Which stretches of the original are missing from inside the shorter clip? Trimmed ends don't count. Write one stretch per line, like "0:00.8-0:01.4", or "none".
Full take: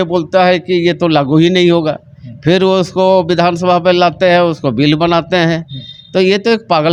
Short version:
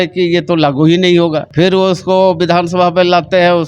0:02.0-0:02.3